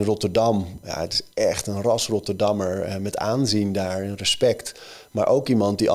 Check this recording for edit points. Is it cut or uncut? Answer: uncut